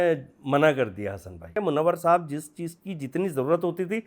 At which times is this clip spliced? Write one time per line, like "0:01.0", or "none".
0:01.6